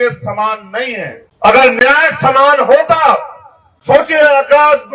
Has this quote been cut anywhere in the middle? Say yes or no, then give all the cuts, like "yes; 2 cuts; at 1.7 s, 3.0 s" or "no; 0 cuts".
yes; 1 cut; at 1.2 s